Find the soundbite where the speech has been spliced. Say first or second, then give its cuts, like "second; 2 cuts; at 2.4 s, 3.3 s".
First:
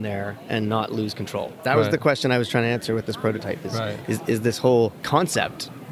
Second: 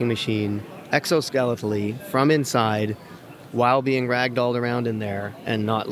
first; 1 cut; at 5.0 s